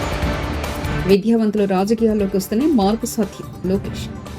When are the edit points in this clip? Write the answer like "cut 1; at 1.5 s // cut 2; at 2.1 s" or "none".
cut 1; at 1.0 s